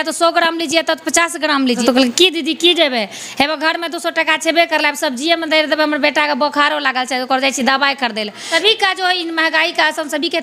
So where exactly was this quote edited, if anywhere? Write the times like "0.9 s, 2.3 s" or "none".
1.8 s, 8.4 s